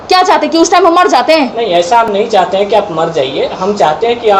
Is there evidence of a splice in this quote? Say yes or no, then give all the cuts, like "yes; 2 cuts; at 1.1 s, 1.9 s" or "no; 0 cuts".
no; 0 cuts